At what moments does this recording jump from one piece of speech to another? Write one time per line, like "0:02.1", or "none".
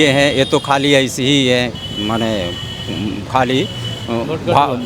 none